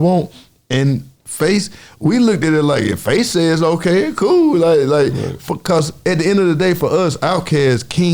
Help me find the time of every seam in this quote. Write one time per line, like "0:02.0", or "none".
none